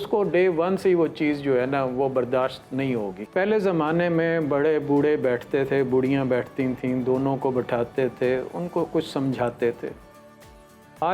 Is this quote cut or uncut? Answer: cut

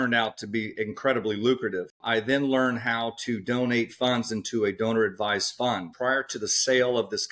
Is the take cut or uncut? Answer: cut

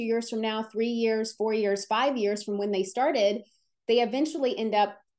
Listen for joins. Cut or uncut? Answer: uncut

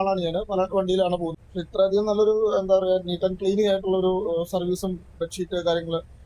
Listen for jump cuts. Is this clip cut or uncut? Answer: cut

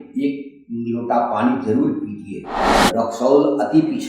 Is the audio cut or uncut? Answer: cut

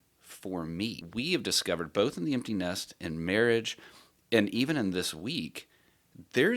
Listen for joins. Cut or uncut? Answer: cut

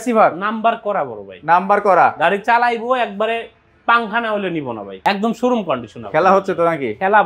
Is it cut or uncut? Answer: cut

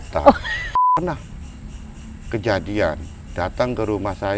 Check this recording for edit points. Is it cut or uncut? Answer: cut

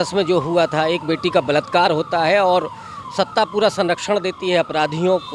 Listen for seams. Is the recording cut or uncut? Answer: uncut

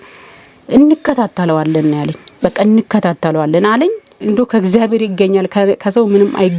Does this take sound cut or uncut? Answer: cut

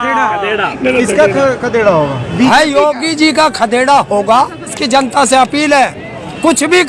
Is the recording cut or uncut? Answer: cut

